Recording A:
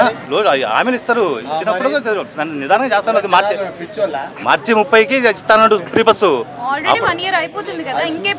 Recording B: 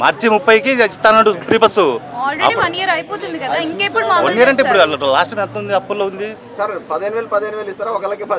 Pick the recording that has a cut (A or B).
B